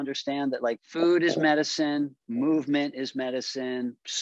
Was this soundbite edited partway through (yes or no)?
no